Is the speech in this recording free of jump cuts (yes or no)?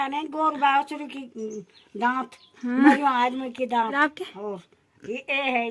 no